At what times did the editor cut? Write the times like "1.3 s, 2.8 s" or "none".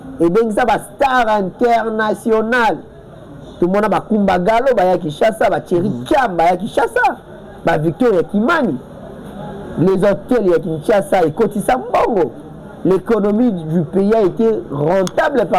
none